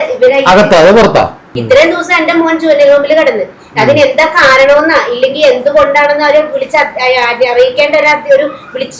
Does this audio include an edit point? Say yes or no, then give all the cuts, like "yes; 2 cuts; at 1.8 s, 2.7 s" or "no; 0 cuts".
yes; 1 cut; at 1.5 s